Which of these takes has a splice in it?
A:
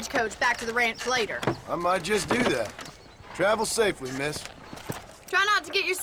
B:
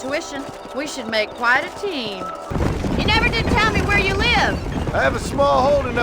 B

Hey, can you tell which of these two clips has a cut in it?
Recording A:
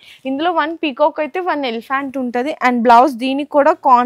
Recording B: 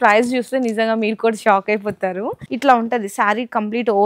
B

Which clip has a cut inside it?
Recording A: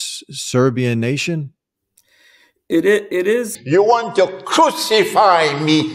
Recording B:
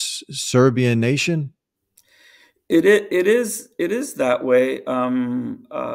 A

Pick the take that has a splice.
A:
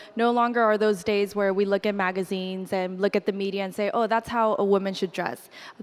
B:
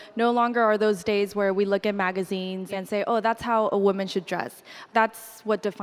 B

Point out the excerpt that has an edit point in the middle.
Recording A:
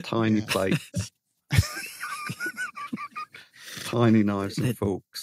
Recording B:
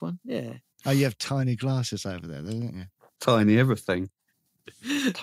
B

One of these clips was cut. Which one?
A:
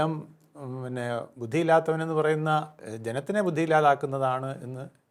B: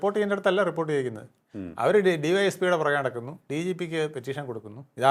A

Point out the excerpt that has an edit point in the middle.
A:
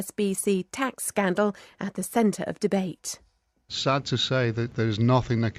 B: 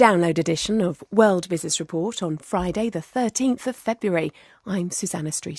A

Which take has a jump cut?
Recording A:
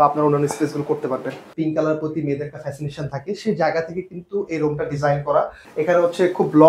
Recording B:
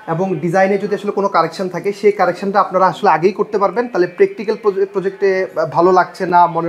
A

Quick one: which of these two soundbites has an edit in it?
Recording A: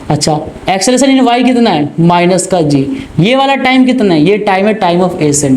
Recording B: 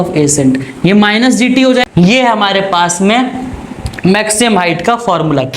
B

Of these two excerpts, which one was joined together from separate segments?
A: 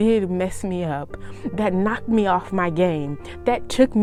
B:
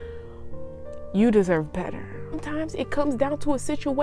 B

